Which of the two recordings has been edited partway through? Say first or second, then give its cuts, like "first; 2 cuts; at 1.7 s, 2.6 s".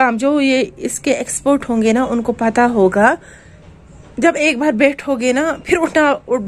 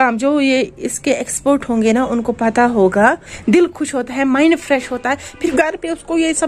second; 2 cuts; at 3.3 s, 5.5 s